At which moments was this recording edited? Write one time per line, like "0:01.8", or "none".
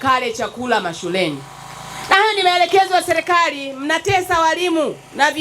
none